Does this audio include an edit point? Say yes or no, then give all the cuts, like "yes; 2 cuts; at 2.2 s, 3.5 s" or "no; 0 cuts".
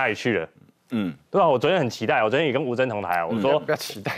no; 0 cuts